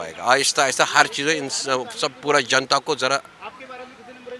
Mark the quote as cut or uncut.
uncut